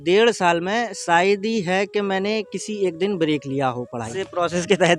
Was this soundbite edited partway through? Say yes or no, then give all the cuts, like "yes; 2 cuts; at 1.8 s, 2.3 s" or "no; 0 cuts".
yes; 1 cut; at 4.1 s